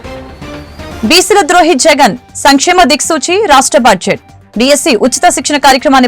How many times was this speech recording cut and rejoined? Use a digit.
0